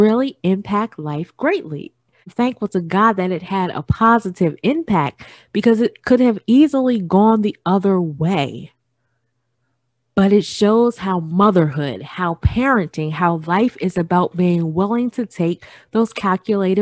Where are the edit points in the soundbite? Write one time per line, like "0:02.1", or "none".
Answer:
0:02.3